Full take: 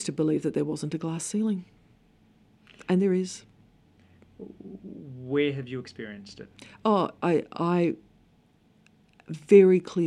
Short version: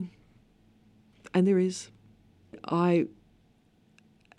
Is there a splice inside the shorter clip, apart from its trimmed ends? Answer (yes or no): yes